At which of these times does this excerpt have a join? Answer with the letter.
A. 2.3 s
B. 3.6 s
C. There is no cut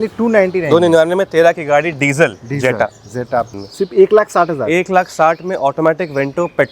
B